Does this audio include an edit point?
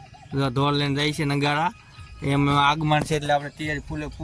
no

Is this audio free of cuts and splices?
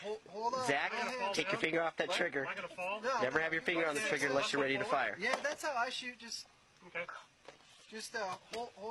yes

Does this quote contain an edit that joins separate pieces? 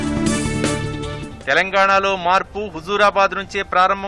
yes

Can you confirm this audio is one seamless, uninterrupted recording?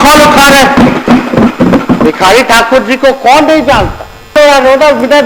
no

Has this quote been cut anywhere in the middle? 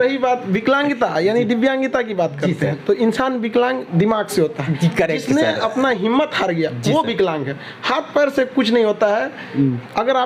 no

